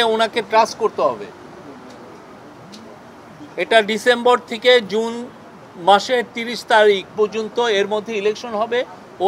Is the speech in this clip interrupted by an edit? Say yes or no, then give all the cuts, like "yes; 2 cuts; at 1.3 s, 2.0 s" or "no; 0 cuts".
no; 0 cuts